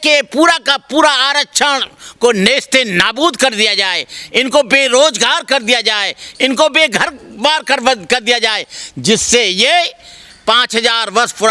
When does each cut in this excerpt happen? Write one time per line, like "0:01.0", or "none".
none